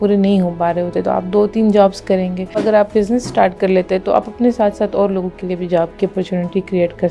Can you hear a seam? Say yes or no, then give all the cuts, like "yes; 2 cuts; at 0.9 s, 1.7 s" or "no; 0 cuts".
yes; 1 cut; at 2.6 s